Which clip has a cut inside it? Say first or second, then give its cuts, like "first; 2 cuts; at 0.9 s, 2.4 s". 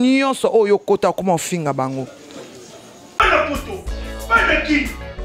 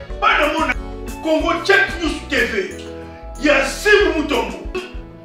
first; 1 cut; at 3.2 s